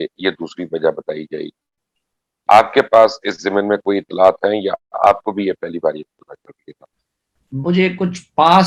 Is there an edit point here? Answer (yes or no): no